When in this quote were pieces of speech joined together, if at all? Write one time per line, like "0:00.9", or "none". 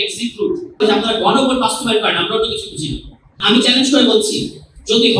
0:00.8
0:03.4

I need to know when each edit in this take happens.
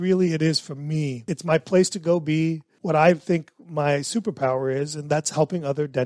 0:01.3
0:02.7

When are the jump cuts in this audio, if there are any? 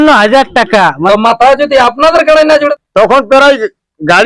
0:01.0
0:02.7

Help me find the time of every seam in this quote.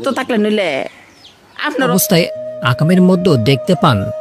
0:01.9

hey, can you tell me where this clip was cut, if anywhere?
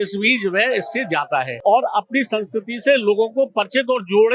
0:01.5

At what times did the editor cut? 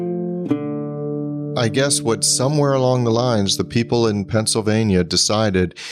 0:01.4

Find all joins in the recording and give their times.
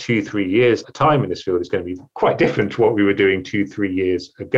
0:02.0

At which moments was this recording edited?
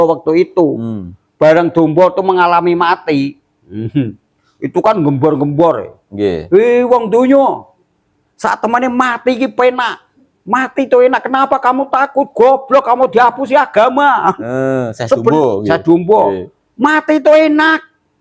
none

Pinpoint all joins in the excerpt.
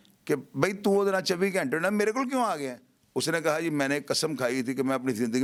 none

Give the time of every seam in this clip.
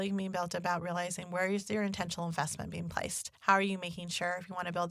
0:03.3

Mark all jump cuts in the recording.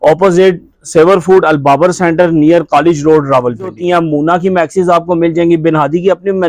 0:03.8

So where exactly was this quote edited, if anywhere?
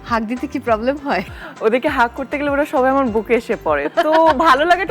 0:01.4

